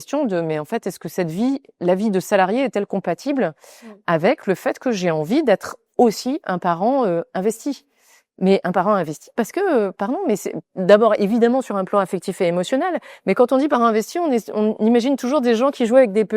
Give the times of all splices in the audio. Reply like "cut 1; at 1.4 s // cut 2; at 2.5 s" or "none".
none